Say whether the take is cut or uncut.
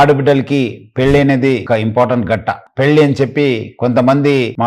cut